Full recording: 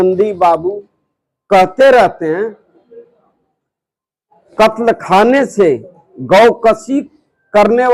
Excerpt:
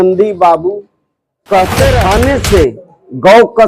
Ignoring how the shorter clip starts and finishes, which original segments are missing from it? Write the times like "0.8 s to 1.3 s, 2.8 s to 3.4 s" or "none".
2.0 s to 5.1 s